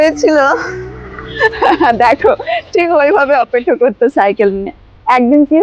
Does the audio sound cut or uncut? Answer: uncut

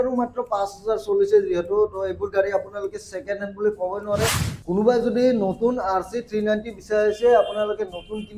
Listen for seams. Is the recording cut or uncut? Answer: cut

